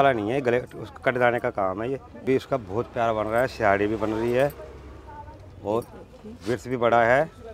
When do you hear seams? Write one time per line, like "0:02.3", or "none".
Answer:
0:02.2

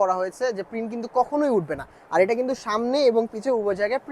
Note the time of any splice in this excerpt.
none

